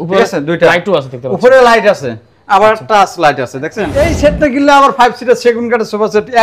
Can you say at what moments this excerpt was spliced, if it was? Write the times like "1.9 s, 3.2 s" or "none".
3.8 s